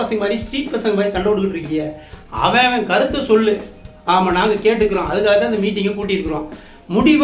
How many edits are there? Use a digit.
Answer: 0